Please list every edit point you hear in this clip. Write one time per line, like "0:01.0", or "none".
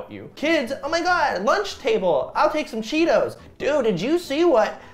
none

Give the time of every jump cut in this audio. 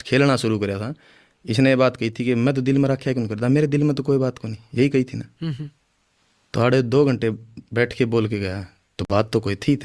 none

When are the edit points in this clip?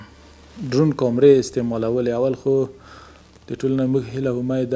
none

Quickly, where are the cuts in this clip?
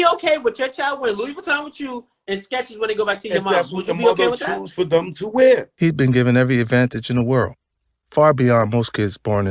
0:05.7

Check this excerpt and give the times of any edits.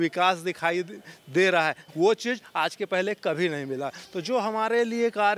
0:01.8

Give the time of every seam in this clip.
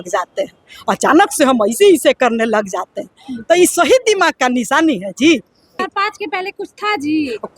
0:05.8

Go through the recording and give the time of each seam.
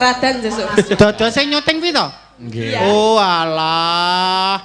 0:01.0

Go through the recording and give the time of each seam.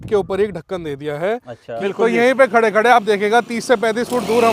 0:01.7

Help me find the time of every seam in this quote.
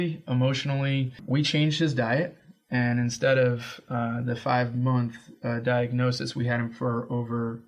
0:01.2

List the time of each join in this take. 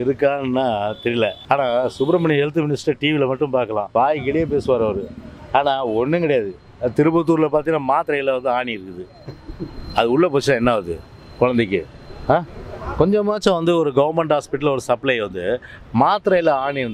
0:01.4
0:03.9

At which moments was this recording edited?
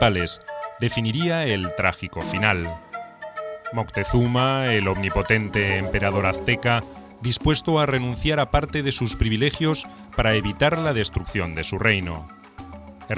none

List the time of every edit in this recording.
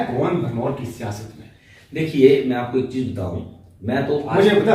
none

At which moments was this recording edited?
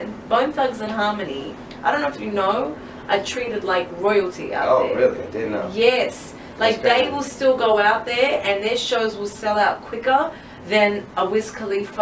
0:07.3

